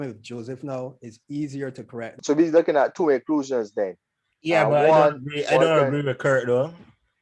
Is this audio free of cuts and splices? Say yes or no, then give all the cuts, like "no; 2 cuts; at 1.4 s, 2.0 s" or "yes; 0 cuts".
no; 1 cut; at 2.2 s